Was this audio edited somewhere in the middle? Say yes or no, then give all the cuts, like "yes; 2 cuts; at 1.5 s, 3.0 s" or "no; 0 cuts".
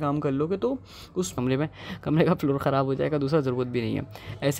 yes; 1 cut; at 1.3 s